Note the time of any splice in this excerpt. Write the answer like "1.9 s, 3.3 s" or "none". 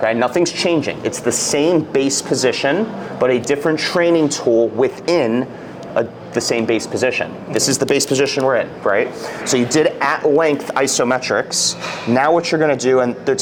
none